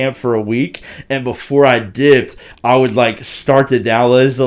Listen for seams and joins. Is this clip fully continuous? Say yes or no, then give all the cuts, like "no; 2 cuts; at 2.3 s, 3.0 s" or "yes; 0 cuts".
yes; 0 cuts